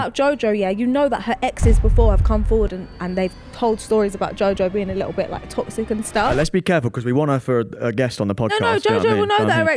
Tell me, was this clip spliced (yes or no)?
no